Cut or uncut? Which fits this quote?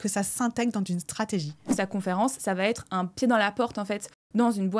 cut